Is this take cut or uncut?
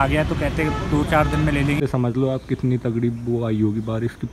cut